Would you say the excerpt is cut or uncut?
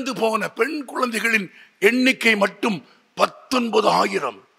uncut